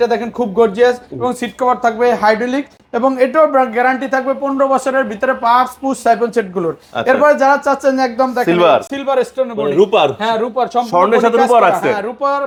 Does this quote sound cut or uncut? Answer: uncut